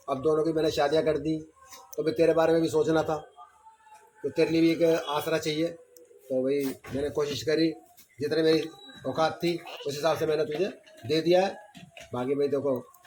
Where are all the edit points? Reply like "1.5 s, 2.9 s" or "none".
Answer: none